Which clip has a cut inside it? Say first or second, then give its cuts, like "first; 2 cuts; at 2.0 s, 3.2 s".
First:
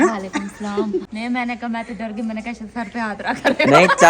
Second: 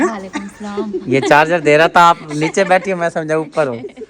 first; 1 cut; at 1.0 s